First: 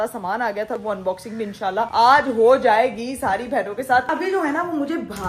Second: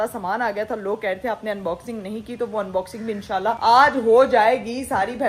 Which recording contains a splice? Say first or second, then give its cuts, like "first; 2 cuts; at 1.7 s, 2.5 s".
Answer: first; 2 cuts; at 0.8 s, 4.1 s